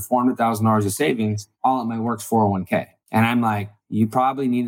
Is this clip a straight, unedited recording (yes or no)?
no